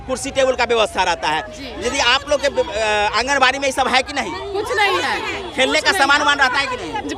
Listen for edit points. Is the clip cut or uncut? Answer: uncut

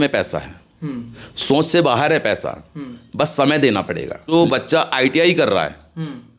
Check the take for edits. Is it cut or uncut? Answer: cut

